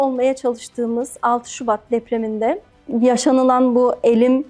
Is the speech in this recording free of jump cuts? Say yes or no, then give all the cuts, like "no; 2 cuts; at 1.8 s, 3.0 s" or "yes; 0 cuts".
yes; 0 cuts